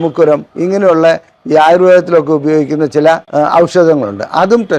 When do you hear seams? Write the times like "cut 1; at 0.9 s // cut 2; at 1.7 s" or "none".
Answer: none